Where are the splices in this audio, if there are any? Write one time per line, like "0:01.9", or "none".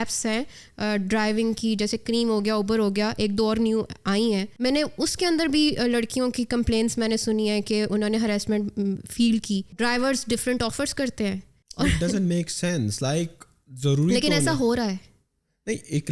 0:04.5
0:09.7
0:11.6